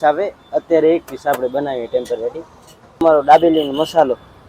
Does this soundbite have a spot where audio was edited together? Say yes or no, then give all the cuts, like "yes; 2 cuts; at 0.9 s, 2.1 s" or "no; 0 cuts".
yes; 1 cut; at 3.0 s